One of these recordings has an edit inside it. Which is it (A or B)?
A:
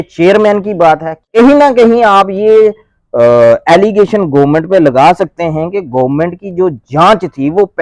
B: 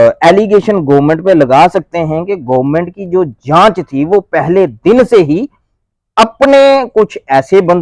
A